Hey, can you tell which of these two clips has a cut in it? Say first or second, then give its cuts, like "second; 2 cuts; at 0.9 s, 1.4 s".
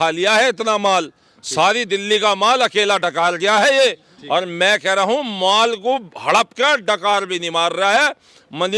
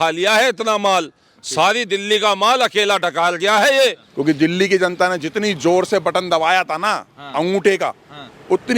second; 1 cut; at 4.1 s